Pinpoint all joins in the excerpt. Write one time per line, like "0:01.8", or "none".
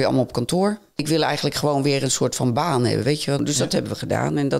0:01.0
0:03.4